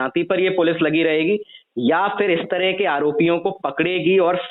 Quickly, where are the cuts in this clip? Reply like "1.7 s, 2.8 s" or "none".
none